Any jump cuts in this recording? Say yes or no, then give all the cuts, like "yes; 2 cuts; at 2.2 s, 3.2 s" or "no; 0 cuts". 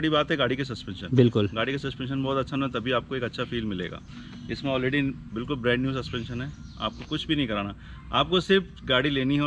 no; 0 cuts